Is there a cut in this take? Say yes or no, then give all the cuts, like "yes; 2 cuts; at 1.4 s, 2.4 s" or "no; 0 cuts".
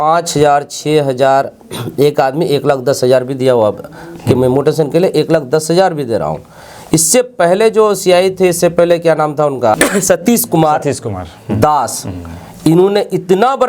no; 0 cuts